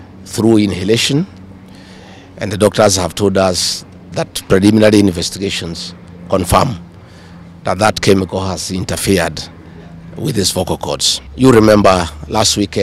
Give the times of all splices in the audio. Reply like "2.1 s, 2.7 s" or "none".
11.2 s

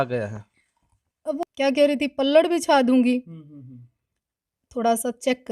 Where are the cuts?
1.4 s

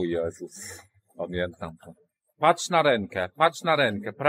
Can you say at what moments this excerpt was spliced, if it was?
2.2 s

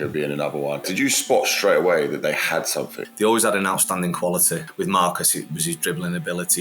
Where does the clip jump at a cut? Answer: 0.9 s, 3.0 s, 4.7 s

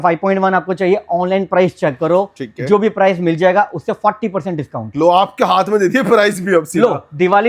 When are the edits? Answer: none

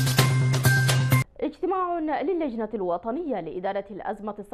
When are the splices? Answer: 1.1 s

